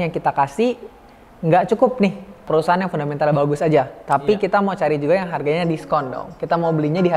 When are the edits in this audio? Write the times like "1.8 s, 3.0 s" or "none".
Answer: 2.5 s